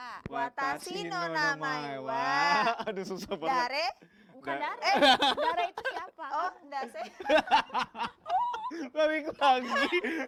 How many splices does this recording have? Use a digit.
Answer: 0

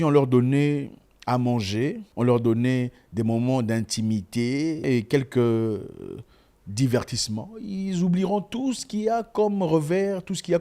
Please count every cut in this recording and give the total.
2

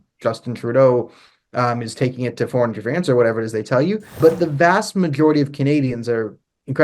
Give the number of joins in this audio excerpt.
1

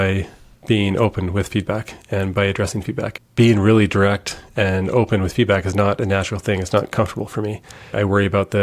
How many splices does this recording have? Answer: 1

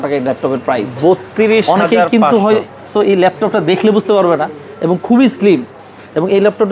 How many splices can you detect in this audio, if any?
0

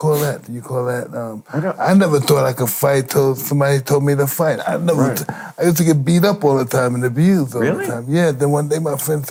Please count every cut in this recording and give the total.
0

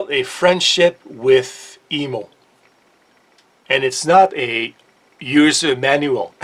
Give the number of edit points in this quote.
0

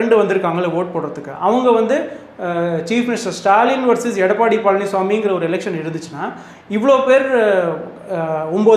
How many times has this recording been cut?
0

